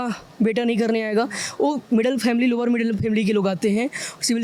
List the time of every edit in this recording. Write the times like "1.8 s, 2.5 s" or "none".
none